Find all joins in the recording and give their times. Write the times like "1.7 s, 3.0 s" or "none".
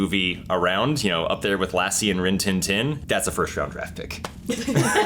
3.0 s